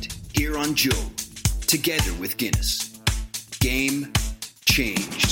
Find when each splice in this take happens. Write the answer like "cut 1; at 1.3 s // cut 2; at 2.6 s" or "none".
none